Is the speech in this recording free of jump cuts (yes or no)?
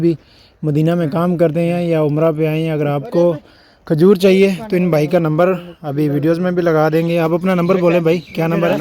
yes